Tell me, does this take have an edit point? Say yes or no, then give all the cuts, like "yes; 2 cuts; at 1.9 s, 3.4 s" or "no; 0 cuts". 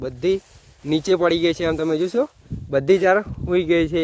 no; 0 cuts